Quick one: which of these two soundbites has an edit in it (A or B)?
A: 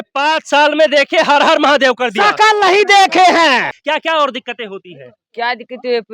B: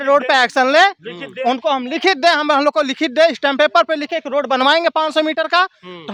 A